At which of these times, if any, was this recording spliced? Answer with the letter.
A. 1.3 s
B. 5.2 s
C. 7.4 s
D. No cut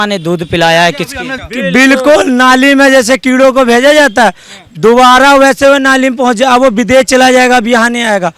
A